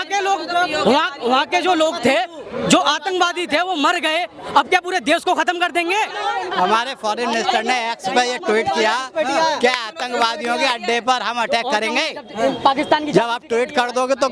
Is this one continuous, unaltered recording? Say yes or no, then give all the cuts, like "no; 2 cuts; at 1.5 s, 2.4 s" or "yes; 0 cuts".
no; 1 cut; at 6.4 s